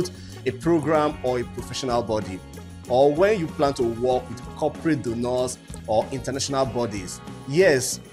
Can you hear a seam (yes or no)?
no